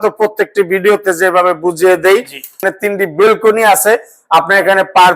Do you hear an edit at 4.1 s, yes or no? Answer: no